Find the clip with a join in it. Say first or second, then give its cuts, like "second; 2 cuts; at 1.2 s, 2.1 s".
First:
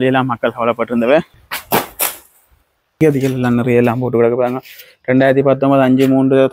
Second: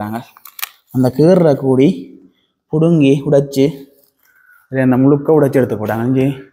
first; 2 cuts; at 1.3 s, 3.0 s